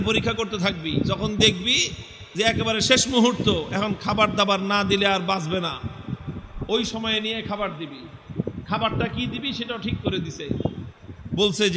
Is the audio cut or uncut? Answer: uncut